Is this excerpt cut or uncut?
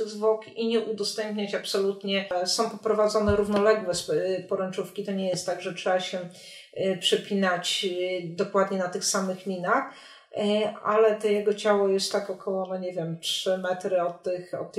cut